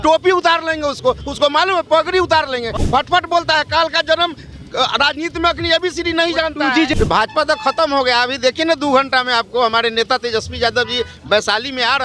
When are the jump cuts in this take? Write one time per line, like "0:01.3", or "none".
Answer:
0:02.7
0:06.9